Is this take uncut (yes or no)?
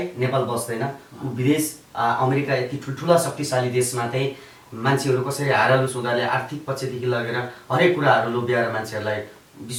yes